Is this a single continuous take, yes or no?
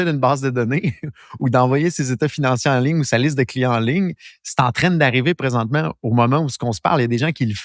yes